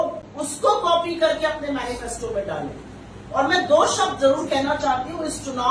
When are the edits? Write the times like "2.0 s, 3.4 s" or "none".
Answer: none